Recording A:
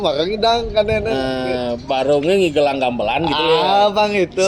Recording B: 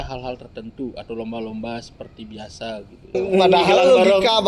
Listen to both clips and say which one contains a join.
B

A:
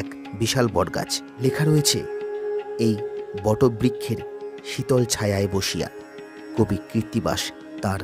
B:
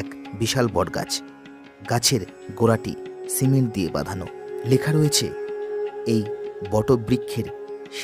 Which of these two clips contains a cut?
A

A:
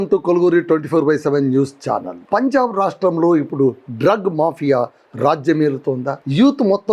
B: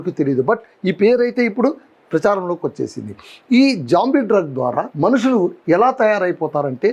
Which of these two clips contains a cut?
A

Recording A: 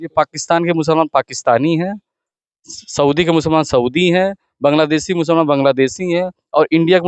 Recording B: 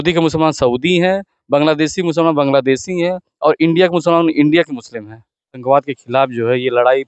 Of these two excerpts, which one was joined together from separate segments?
B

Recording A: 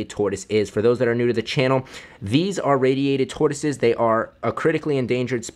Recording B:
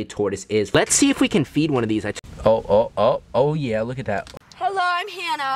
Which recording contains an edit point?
B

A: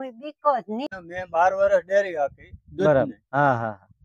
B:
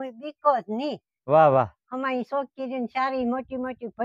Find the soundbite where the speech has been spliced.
A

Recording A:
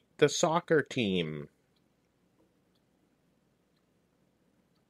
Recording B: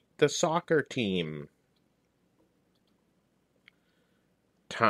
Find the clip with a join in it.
B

